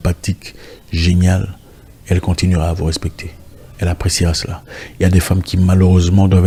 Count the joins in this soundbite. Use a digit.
0